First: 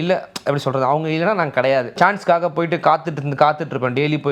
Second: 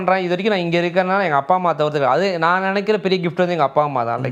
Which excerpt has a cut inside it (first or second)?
first